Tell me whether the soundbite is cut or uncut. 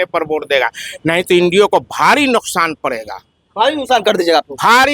uncut